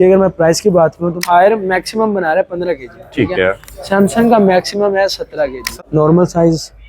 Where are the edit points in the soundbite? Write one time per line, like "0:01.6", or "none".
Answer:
0:01.2
0:05.7